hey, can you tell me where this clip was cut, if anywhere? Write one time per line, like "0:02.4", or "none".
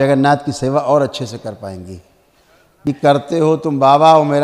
0:02.6